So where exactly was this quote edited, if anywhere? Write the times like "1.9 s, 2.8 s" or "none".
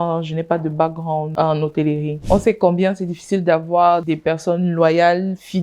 1.3 s, 2.1 s, 4.1 s